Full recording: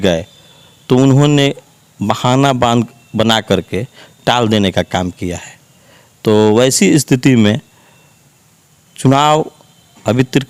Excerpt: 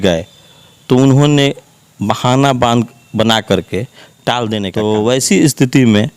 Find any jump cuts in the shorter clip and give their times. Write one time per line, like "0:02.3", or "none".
0:04.7